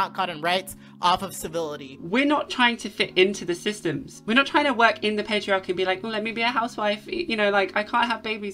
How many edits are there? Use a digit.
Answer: 1